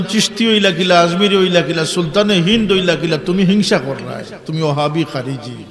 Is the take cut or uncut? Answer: uncut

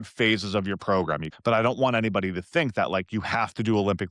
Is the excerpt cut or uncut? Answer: cut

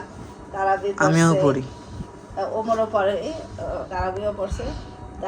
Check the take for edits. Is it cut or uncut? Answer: cut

